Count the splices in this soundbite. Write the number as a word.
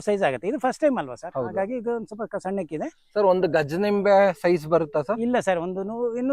zero